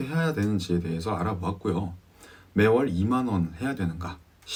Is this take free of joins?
yes; 0 cuts

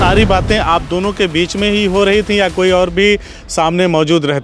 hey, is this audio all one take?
yes; 0 cuts

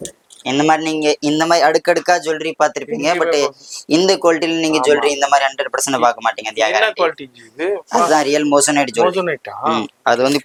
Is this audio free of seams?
yes; 0 cuts

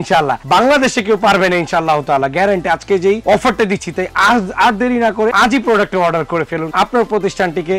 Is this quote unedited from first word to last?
yes; 0 cuts

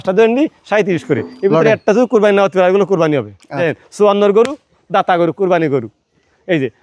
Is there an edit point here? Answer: yes; 1 cut; at 3.6 s

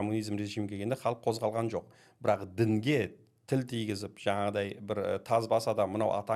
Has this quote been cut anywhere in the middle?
no; 0 cuts

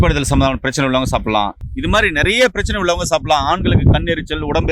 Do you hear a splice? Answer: no; 0 cuts

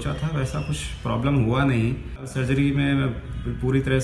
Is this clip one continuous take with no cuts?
no; 1 cut; at 2.4 s

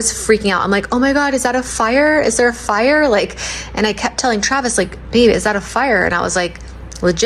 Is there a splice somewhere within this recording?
no; 0 cuts

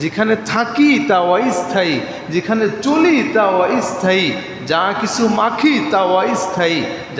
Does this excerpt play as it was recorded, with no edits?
yes; 0 cuts

